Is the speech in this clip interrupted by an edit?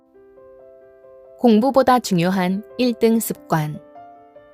yes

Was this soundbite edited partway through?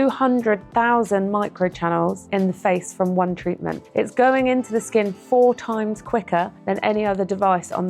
yes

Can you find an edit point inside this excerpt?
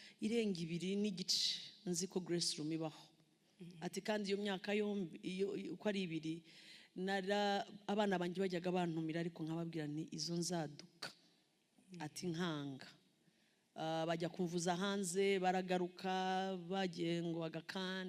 no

